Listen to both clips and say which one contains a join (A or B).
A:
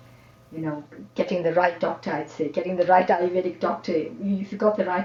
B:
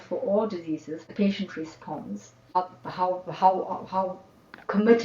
B